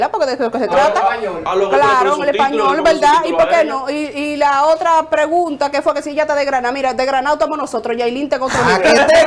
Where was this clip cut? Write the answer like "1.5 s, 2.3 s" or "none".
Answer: none